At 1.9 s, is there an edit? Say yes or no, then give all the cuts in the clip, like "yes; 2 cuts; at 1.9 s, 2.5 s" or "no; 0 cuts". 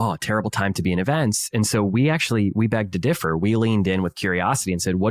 no; 0 cuts